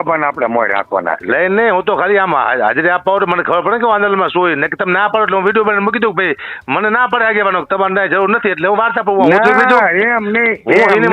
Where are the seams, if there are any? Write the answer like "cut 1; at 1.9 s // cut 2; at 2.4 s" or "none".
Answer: none